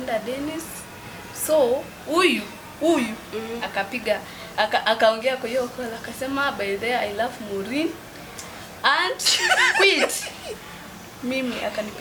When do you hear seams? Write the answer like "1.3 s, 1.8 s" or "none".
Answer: none